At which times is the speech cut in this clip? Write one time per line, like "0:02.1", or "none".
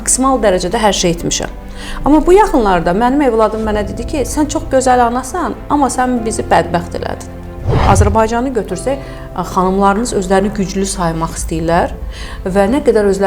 0:07.8